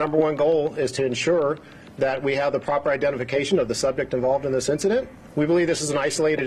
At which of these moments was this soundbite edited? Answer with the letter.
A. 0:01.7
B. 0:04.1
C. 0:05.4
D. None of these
D